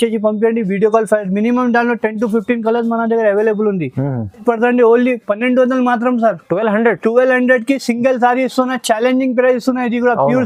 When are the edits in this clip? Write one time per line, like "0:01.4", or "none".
none